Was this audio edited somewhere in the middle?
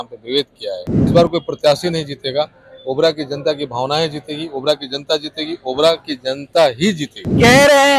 yes; 1 cut; at 1.1 s

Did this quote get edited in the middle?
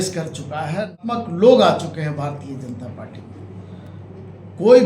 yes; 1 cut; at 1.0 s

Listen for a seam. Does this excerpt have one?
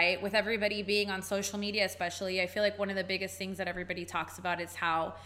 no; 0 cuts

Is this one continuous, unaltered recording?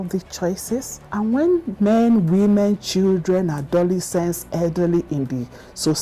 no; 1 cut; at 1.0 s

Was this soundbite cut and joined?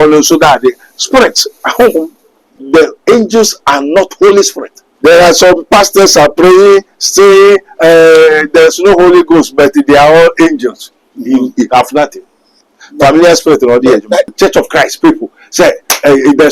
yes; 3 cuts; at 2.5 s, 4.8 s, 14.3 s

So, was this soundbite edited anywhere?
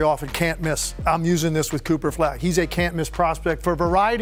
no; 0 cuts

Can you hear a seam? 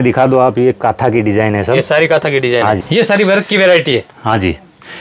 yes; 1 cut; at 2.8 s

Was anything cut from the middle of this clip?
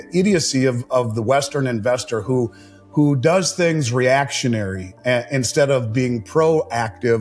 no; 0 cuts

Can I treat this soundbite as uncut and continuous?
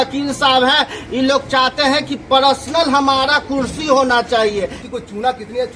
no; 1 cut; at 4.8 s

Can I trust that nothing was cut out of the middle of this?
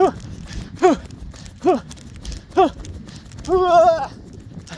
yes; 0 cuts

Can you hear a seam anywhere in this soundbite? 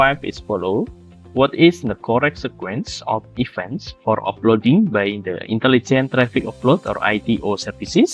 no; 0 cuts

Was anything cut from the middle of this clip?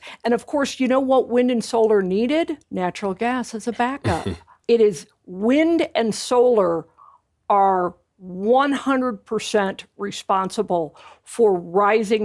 yes; 2 cuts; at 2.6 s, 4.5 s

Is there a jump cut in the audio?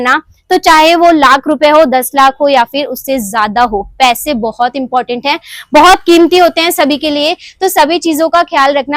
no; 0 cuts

